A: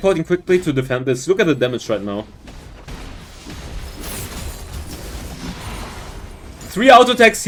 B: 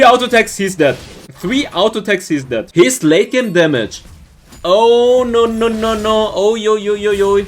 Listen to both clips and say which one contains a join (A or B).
B